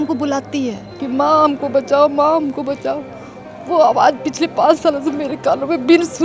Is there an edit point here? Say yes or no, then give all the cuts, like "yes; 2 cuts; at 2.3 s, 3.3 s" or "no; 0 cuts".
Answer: yes; 1 cut; at 1.0 s